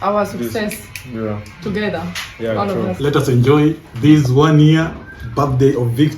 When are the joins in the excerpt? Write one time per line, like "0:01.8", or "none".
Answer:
0:03.0